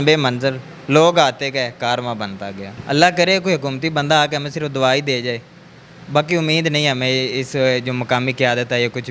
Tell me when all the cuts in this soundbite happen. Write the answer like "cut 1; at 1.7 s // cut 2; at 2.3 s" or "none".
cut 1; at 2.7 s